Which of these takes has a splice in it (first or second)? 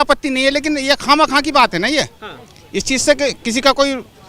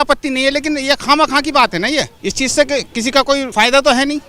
second